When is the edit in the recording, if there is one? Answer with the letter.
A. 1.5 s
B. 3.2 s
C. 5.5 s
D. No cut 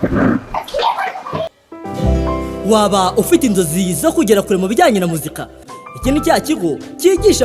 A